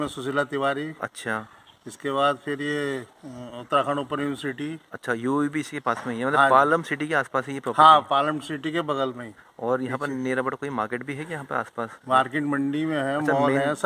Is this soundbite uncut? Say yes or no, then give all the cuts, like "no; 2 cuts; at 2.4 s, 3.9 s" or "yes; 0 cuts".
yes; 0 cuts